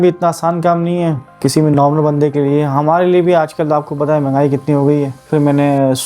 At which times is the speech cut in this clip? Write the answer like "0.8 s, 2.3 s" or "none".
1.7 s, 5.3 s